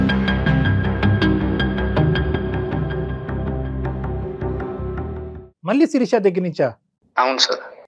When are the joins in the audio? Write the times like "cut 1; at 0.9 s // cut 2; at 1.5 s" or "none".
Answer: none